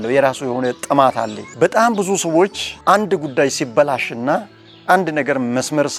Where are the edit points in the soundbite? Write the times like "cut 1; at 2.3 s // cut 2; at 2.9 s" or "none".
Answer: none